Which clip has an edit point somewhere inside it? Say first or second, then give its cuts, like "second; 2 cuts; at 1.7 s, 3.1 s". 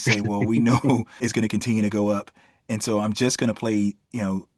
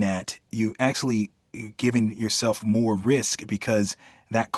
first; 1 cut; at 1.2 s